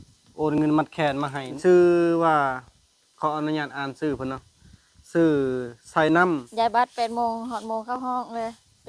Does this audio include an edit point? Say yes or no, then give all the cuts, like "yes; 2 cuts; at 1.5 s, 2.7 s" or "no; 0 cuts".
yes; 2 cuts; at 1.6 s, 6.5 s